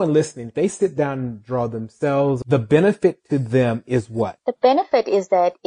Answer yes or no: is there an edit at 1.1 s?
no